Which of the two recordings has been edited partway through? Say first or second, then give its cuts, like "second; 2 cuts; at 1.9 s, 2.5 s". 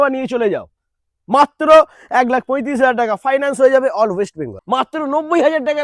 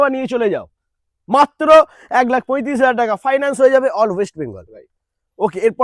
first; 1 cut; at 4.5 s